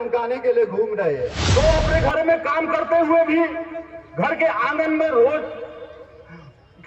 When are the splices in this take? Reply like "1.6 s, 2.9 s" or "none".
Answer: 1.4 s